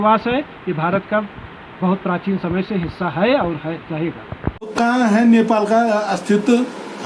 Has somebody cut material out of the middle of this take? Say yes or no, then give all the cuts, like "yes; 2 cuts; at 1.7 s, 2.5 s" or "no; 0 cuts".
yes; 1 cut; at 4.7 s